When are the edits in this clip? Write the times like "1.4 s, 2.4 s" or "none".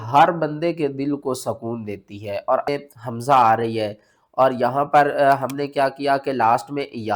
2.7 s

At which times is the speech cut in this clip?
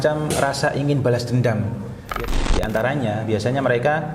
2.1 s

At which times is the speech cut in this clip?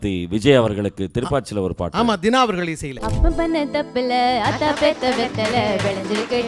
2.9 s

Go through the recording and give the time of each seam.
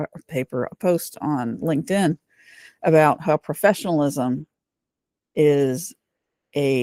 none

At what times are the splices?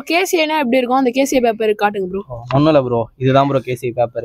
none

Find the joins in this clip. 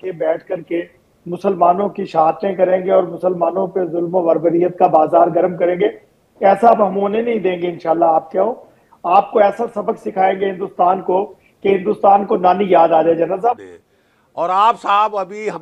13.6 s

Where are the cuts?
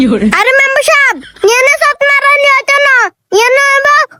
none

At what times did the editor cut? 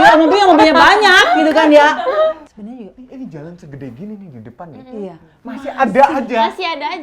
2.4 s

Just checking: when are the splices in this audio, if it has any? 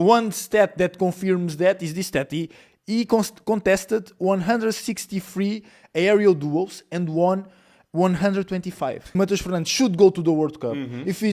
9.1 s

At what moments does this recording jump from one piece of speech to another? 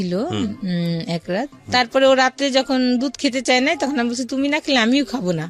1.6 s

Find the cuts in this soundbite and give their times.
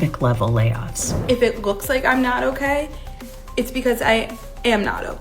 1.1 s

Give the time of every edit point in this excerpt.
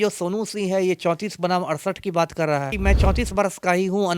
2.7 s

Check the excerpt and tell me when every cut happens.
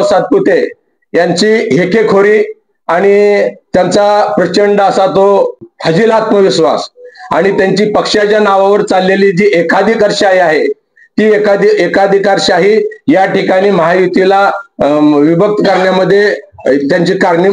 none

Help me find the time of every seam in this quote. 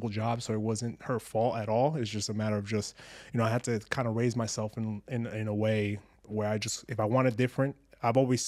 none

